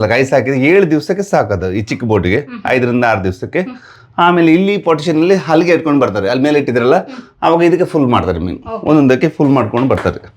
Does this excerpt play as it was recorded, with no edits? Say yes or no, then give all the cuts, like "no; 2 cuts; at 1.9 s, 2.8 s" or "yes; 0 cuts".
yes; 0 cuts